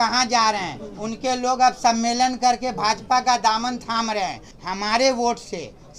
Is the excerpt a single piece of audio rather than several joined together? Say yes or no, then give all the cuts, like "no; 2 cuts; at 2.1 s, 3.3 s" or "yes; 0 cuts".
no; 1 cut; at 4.5 s